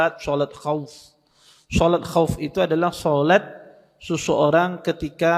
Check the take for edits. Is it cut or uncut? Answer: uncut